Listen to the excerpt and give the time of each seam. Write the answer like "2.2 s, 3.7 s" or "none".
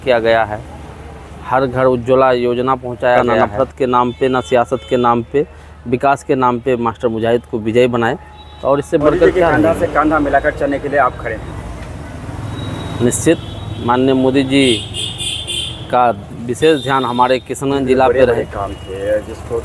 3.4 s, 9.4 s, 18.3 s